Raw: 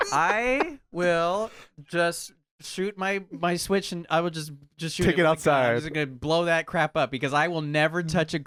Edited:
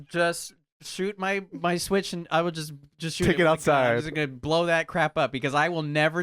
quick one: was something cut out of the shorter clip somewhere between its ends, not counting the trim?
no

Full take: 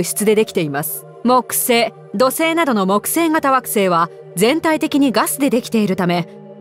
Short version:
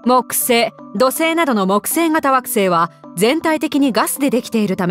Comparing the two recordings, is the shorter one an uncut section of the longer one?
yes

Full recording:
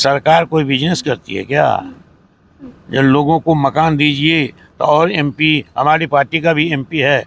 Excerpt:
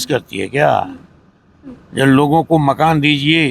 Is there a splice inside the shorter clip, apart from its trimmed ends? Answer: no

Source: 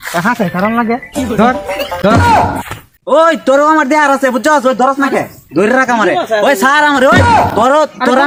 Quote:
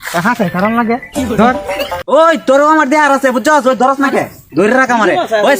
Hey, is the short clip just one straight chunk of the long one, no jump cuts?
no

